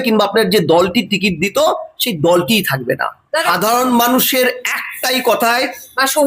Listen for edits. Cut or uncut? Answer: uncut